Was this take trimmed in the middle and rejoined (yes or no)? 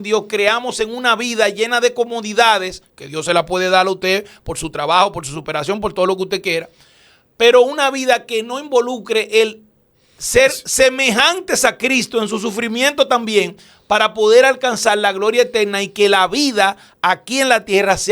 no